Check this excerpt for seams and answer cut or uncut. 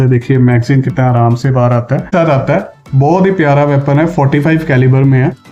cut